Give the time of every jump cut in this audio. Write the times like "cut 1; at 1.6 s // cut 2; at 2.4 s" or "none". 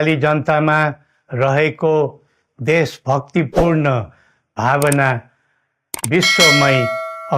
none